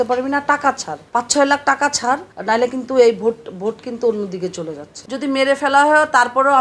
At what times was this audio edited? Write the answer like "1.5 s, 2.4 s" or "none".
0.9 s, 2.3 s, 4.9 s